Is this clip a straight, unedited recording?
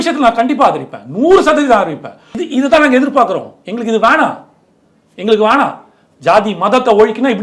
no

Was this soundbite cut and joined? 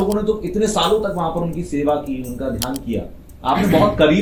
no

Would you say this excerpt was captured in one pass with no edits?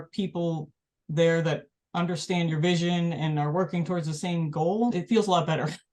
yes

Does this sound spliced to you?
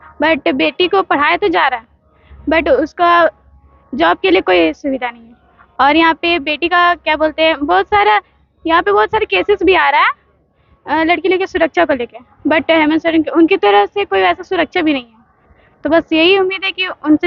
no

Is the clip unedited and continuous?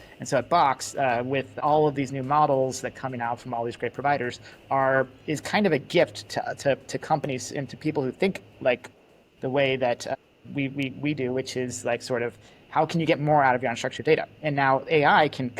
no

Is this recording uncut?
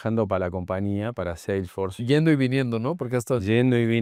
yes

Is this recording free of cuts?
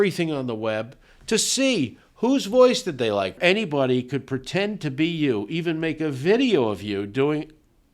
no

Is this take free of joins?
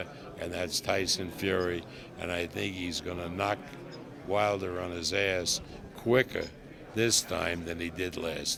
yes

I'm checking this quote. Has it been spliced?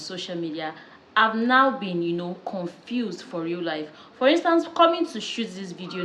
no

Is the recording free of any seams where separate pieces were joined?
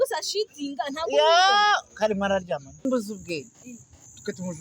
no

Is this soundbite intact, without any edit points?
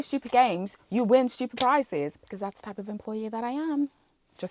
no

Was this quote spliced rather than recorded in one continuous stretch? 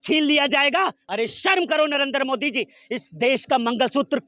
no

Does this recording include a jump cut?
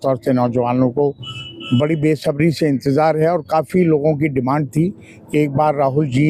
no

